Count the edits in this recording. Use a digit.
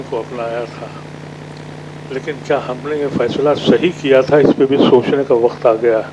0